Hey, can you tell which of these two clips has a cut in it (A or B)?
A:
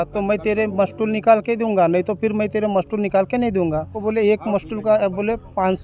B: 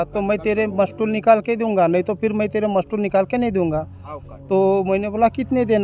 A